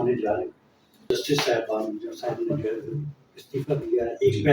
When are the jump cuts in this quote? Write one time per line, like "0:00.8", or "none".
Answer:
0:01.1